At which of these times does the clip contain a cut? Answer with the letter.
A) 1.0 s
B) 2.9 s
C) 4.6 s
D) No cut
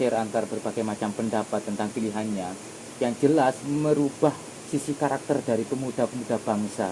D